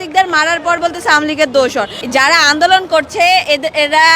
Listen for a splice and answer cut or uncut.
cut